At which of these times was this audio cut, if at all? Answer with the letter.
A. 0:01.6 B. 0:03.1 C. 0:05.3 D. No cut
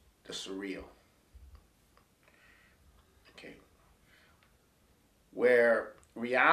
D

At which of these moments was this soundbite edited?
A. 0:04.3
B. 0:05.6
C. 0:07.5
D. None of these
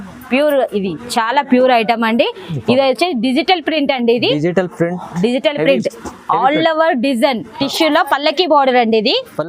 C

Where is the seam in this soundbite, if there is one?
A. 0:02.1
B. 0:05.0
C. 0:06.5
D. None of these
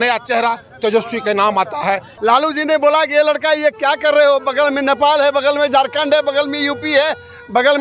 A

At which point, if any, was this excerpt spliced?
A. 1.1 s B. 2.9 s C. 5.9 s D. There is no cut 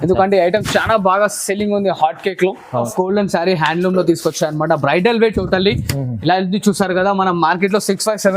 B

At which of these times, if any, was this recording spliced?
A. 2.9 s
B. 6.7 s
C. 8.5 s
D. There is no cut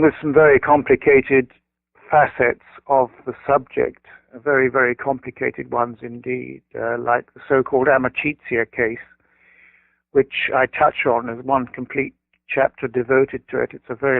B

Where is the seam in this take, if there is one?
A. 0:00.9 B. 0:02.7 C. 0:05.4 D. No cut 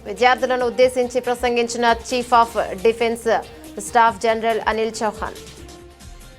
C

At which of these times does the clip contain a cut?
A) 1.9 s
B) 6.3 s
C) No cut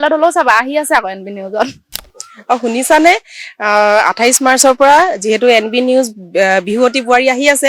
A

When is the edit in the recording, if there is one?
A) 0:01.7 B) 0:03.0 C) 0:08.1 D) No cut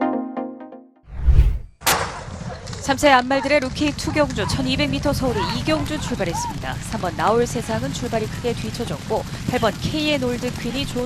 A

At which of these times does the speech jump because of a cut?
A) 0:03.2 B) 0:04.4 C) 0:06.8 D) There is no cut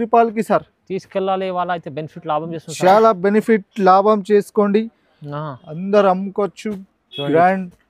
D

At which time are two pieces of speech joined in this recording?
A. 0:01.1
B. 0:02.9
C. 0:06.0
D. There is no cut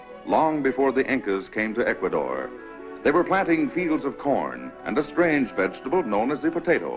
A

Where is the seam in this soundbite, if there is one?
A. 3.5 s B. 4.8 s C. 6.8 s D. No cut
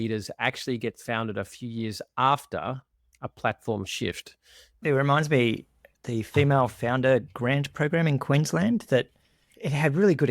B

